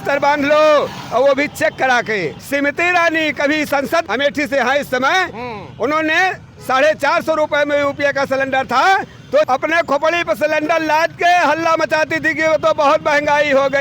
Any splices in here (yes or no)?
yes